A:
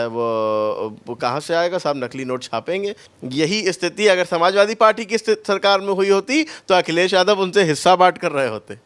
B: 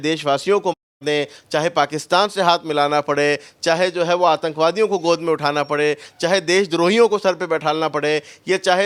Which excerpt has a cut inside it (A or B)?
A